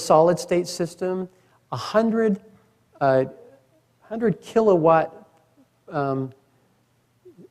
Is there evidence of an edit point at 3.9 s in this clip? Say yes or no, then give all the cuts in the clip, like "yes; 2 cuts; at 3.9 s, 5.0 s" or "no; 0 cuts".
no; 1 cut; at 1.2 s